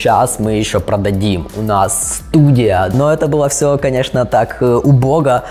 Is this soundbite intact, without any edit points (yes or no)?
no